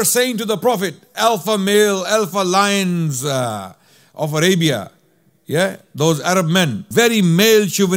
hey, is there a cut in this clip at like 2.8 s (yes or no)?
no